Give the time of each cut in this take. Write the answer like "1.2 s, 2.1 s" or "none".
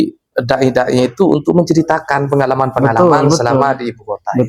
none